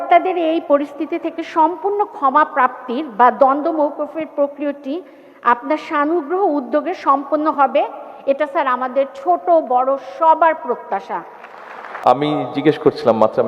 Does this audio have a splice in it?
yes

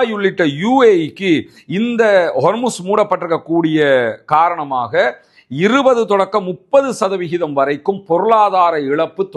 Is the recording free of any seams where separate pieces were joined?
yes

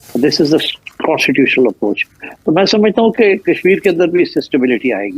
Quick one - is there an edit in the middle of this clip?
no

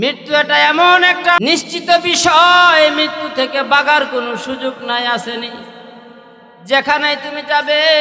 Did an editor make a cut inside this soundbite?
yes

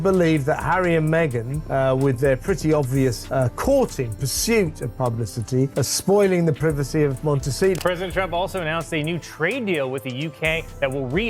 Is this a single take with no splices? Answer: no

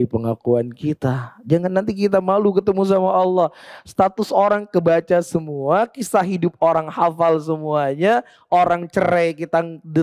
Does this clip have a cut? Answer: no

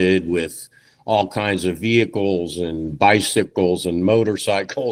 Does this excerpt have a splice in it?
no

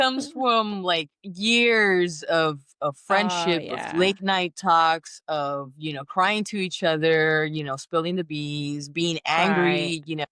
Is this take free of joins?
yes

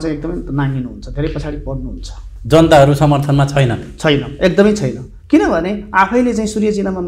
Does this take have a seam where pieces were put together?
no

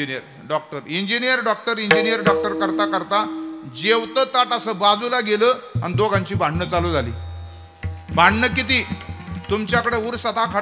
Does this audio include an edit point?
no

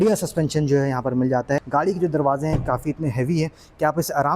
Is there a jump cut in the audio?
yes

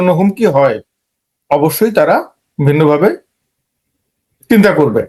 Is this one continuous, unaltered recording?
yes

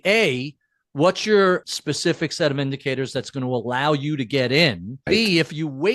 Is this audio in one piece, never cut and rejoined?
no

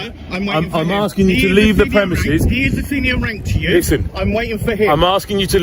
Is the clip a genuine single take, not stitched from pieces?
yes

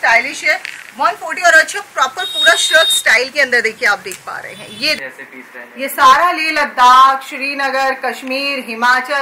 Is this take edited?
yes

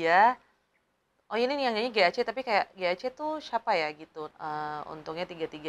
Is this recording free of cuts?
no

